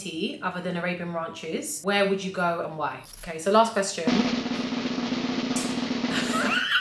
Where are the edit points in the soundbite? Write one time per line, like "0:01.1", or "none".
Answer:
0:01.7
0:03.2